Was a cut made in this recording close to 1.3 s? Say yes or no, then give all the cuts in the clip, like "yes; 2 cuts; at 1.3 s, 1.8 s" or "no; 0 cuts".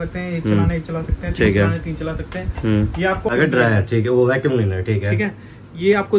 no; 1 cut; at 3.3 s